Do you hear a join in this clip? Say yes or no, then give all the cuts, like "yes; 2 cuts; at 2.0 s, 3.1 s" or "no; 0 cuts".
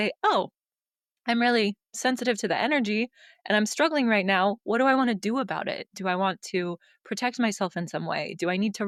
no; 0 cuts